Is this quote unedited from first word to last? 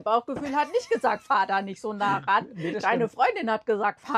yes; 0 cuts

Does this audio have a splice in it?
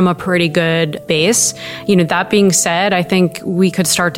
no; 0 cuts

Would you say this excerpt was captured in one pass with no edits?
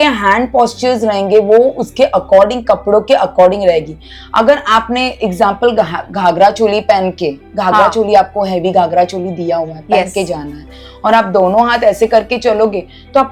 yes; 0 cuts

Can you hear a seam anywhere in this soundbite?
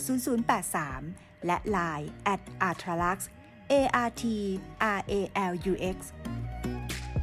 yes; 1 cut; at 6.1 s

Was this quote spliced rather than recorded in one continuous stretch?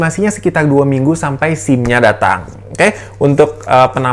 no; 0 cuts

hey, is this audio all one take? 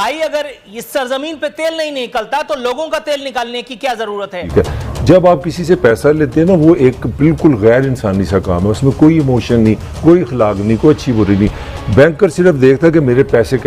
no; 1 cut; at 4.4 s

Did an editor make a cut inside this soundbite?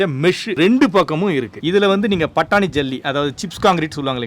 yes; 1 cut; at 1.6 s

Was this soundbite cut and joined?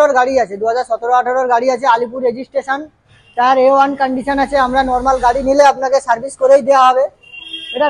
no; 0 cuts

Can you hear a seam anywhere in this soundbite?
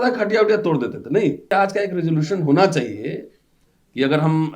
yes; 1 cut; at 1.5 s

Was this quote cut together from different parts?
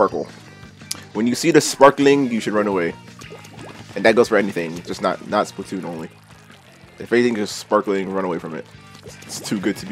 no; 0 cuts

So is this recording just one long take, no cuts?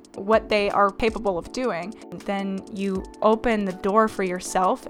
no; 2 cuts; at 1.0 s, 2.2 s

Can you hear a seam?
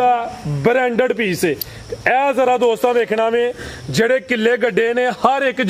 no; 0 cuts

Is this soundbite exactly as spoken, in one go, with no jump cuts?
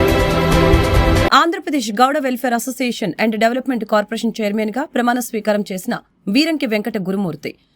no; 1 cut; at 1.3 s

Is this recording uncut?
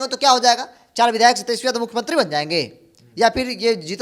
yes; 0 cuts

